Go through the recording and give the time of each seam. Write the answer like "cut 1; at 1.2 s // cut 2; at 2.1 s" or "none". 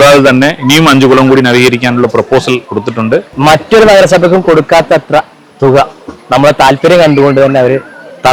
cut 1; at 3.3 s

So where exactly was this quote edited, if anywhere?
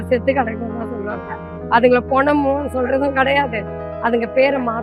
none

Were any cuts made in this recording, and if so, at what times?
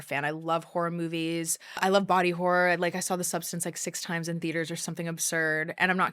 cut 1; at 1.8 s

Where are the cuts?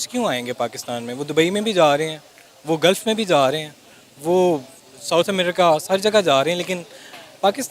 none

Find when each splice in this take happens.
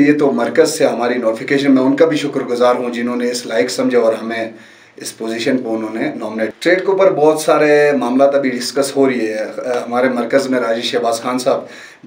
cut 1; at 6.5 s

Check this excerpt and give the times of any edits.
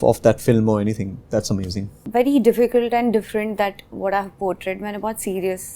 cut 1; at 2.0 s

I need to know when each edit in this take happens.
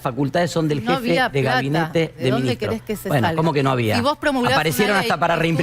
none

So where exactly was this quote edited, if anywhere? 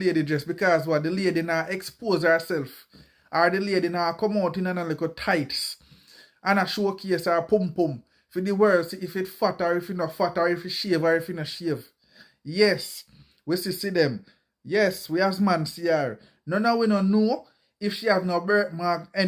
none

